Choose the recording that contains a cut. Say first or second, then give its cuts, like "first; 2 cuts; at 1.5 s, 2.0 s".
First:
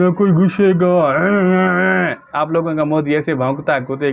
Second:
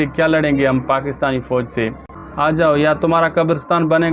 second; 1 cut; at 2.2 s